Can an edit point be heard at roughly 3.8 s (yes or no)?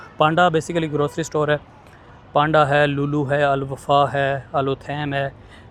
no